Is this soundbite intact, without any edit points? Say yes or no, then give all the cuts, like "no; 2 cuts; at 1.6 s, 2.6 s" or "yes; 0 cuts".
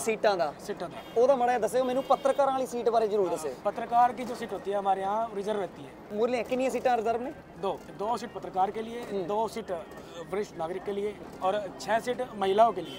no; 3 cuts; at 6.1 s, 7.9 s, 11.2 s